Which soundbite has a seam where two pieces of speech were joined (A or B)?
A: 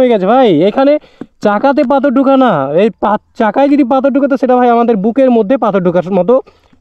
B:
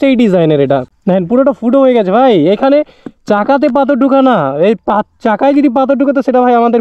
B